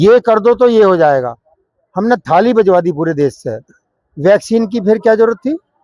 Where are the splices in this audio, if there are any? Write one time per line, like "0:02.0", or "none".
none